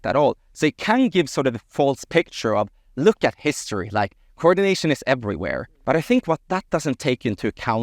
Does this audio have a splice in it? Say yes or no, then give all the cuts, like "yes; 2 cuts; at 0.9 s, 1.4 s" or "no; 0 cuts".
yes; 1 cut; at 5.7 s